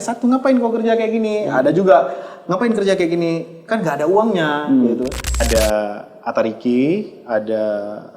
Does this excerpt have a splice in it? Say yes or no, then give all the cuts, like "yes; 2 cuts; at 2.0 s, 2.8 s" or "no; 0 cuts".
yes; 1 cut; at 5.4 s